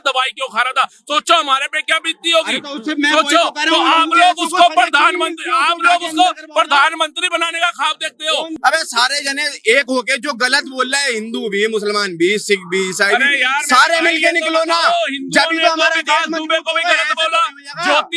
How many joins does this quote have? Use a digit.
1